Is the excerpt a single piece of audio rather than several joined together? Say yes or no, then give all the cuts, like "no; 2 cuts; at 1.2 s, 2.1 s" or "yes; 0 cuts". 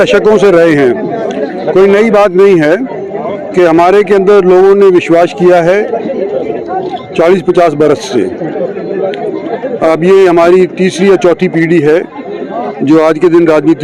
yes; 0 cuts